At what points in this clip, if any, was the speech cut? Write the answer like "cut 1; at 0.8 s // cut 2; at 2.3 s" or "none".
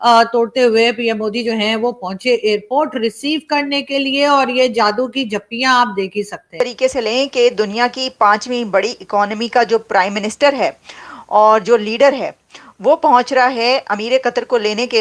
cut 1; at 6.5 s